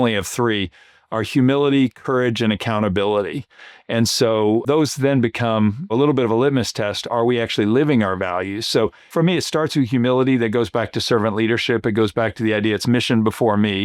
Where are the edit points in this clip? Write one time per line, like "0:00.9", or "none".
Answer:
0:04.6
0:05.9
0:09.0

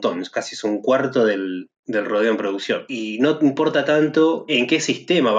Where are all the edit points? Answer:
0:02.9
0:04.5

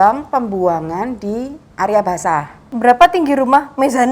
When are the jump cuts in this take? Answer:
0:02.7

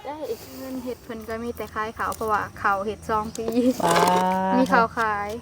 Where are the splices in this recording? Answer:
0:01.0

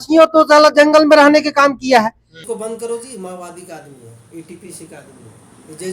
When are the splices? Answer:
0:02.4

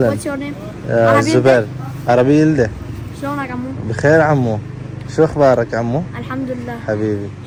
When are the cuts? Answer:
none

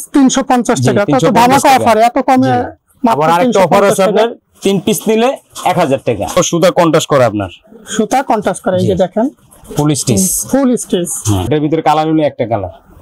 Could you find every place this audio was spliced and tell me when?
0:06.3
0:11.4

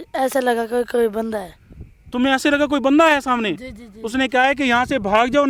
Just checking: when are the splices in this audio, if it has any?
none

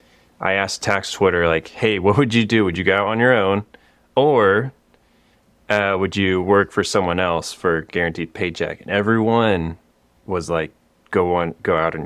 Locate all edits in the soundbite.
none

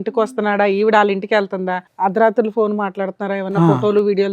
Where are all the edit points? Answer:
0:01.8

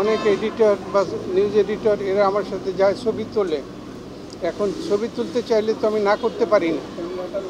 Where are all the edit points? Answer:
none

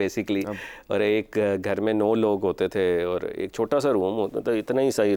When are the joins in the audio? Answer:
none

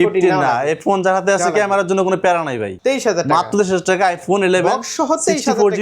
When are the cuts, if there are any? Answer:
0:02.7

